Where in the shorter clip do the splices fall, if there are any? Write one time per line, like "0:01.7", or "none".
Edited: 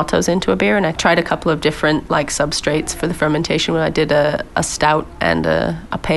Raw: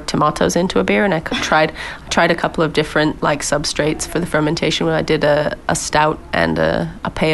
0:00.9